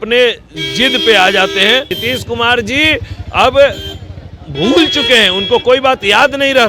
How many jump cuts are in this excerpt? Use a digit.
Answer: 1